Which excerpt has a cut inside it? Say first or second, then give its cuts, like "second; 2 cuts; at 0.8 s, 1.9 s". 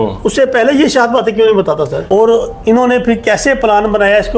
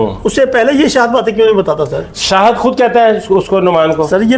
first; 1 cut; at 2.0 s